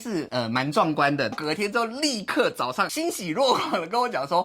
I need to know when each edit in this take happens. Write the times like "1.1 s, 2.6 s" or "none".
1.3 s